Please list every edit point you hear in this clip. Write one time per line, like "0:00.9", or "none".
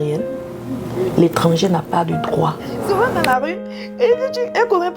0:02.8